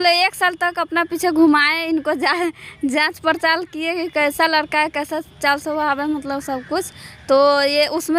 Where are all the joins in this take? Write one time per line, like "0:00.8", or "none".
none